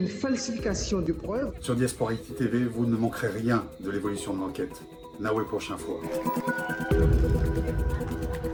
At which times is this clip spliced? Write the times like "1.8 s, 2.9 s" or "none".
none